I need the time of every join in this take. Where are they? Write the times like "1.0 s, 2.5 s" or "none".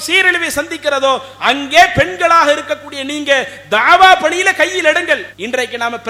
none